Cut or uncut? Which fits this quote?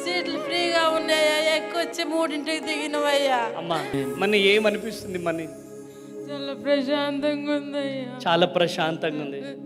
cut